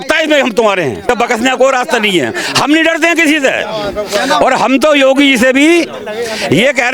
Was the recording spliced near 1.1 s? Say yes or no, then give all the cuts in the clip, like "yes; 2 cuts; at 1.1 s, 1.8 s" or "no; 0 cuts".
yes; 1 cut; at 1.1 s